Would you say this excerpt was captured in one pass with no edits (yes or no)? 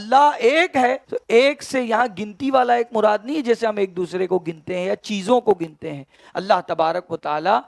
no